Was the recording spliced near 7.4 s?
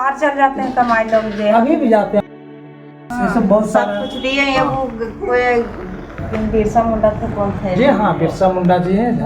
no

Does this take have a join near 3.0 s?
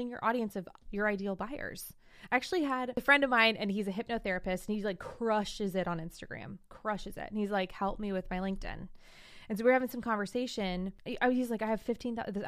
yes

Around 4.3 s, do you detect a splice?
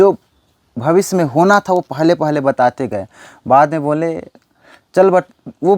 no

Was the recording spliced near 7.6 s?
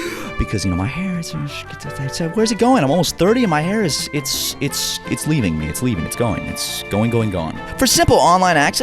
yes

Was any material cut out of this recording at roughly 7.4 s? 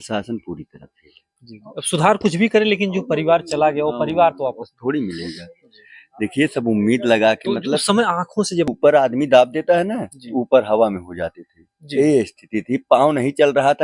no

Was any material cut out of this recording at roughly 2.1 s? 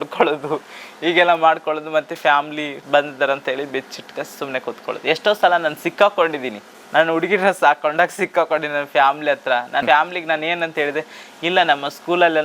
no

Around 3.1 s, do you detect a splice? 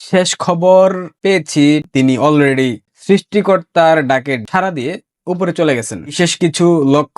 no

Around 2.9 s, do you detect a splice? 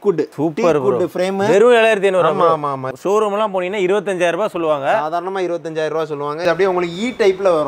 yes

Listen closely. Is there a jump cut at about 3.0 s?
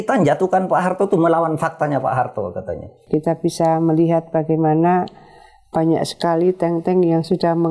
yes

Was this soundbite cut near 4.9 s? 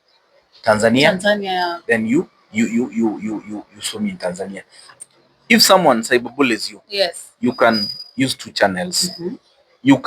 yes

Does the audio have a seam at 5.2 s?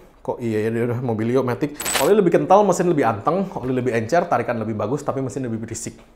no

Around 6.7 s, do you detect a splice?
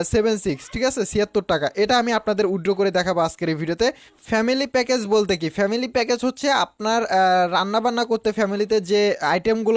no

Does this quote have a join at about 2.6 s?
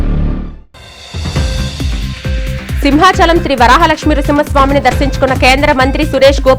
yes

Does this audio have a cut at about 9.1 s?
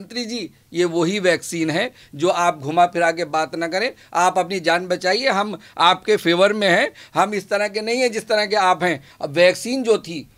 yes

